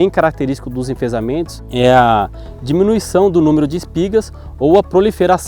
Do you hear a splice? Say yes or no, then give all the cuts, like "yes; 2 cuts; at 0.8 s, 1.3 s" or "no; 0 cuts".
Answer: yes; 1 cut; at 1.6 s